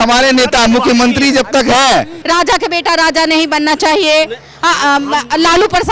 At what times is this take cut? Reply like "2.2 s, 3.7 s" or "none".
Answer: 2.2 s

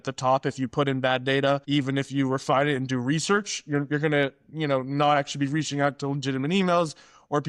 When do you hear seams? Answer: 1.6 s

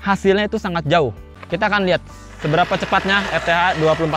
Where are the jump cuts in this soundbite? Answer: 1.3 s

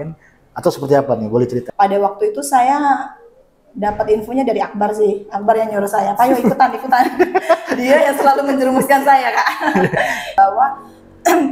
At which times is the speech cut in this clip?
1.7 s, 10.2 s

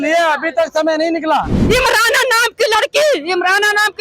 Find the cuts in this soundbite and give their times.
1.6 s

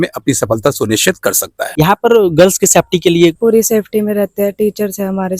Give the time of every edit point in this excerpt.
1.6 s, 3.4 s

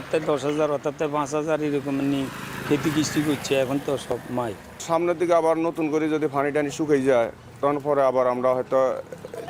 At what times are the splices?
none

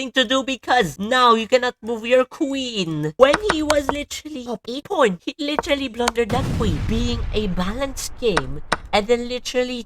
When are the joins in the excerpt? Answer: 3.1 s

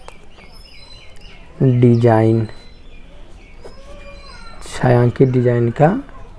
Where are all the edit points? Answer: none

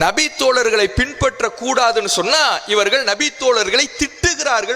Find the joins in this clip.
none

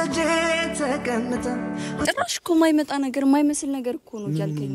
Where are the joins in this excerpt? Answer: 2.1 s

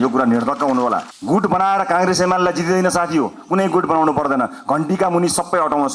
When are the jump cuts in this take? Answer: 1.1 s

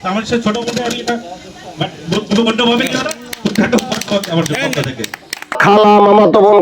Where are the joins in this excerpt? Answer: 5.6 s

